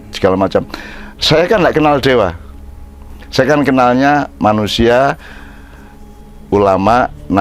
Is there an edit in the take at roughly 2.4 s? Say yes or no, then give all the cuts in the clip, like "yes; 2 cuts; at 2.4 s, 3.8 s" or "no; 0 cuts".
no; 0 cuts